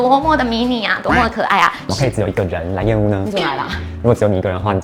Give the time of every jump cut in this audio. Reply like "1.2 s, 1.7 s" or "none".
1.9 s